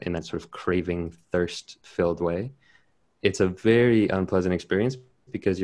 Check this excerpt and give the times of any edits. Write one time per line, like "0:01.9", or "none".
none